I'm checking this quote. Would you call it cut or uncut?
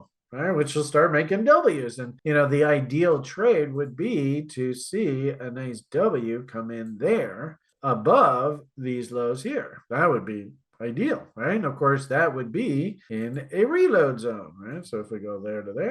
cut